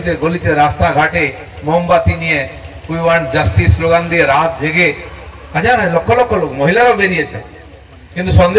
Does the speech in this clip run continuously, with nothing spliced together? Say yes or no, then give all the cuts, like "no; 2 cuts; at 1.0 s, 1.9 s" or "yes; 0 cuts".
yes; 0 cuts